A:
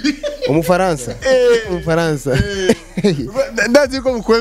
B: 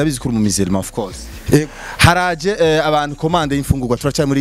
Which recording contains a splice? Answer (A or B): A